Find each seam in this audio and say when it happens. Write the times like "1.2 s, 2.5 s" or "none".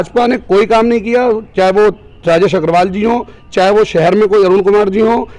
none